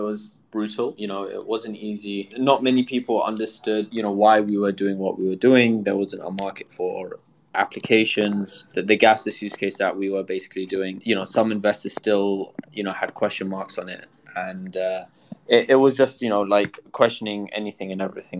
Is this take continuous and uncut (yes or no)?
no